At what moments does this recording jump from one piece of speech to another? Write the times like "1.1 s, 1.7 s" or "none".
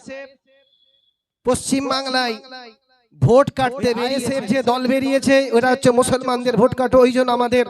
4.2 s